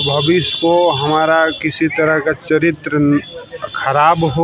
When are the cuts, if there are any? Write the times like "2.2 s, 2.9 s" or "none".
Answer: none